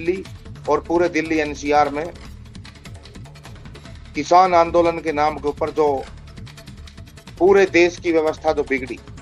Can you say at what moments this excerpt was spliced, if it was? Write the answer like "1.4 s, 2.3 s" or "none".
2.1 s, 4.0 s